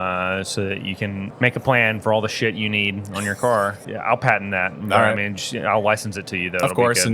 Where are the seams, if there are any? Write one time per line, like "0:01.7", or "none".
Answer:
0:01.3
0:03.9